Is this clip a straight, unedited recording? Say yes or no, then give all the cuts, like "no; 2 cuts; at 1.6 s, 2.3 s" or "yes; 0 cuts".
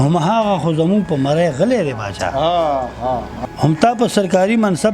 no; 1 cut; at 3.3 s